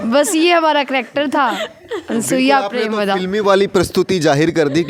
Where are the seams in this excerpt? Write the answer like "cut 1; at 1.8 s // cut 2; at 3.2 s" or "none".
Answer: none